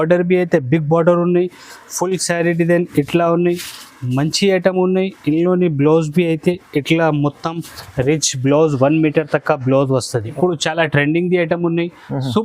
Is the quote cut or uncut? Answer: cut